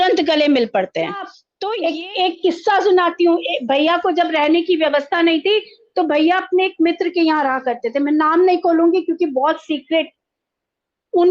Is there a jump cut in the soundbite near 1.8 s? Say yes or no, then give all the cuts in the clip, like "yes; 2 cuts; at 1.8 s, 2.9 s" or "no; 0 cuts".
yes; 1 cut; at 1.8 s